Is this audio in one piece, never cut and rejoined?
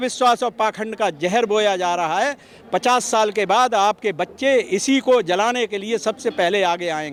yes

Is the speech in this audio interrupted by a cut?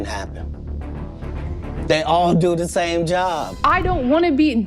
yes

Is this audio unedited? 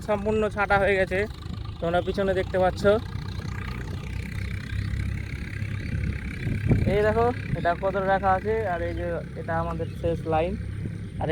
yes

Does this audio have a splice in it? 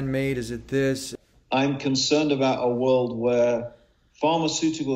yes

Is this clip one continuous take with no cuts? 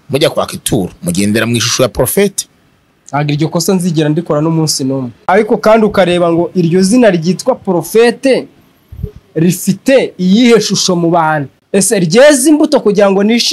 no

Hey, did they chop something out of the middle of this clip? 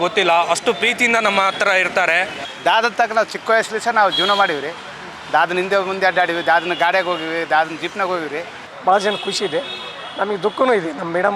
yes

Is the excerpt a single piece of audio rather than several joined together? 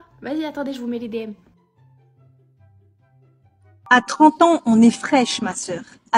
no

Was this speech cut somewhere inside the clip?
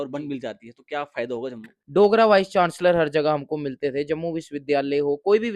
yes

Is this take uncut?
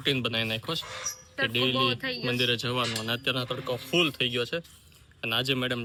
yes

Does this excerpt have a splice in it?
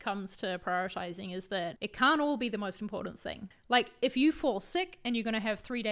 yes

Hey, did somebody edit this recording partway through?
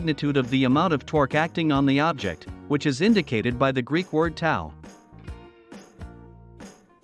no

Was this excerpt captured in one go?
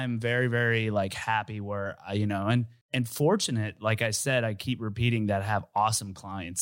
no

